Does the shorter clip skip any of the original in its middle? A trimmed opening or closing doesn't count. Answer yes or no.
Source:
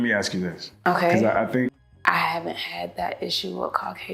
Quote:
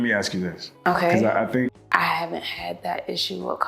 yes